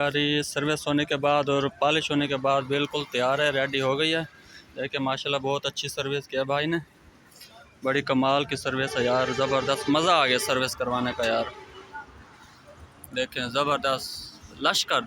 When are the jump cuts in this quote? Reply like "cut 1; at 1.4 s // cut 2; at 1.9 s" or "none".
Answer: none